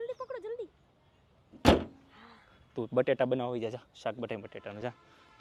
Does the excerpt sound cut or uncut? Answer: uncut